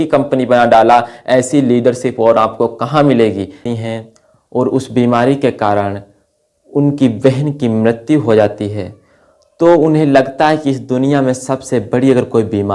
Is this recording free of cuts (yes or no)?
no